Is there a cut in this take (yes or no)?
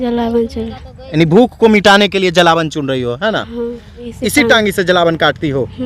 yes